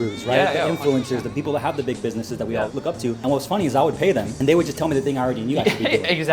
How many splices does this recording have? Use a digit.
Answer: 3